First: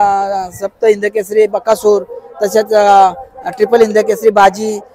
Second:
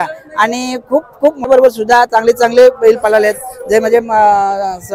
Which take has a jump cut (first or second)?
second